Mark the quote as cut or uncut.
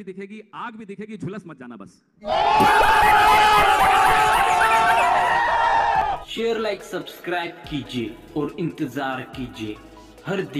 uncut